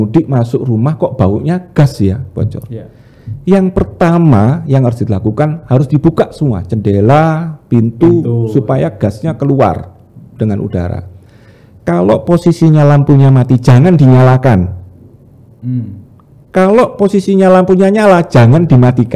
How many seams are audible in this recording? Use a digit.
0